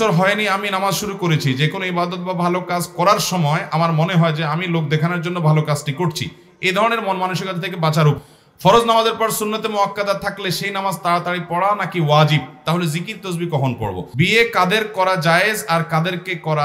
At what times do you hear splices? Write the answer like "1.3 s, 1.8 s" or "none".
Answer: 8.2 s, 14.1 s